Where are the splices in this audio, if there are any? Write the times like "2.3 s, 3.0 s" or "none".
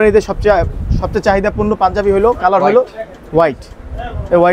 none